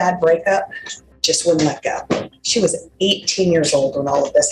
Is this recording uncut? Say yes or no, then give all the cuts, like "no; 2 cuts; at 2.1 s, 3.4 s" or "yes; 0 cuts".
yes; 0 cuts